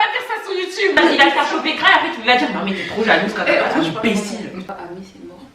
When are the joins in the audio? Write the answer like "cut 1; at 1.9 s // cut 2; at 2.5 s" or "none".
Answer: cut 1; at 1.0 s // cut 2; at 4.6 s